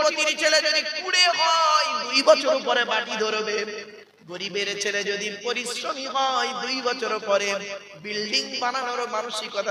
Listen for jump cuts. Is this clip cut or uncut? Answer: uncut